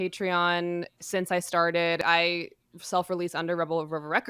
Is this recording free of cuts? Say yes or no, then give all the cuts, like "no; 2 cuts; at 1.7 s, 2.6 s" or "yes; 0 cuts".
no; 1 cut; at 2.0 s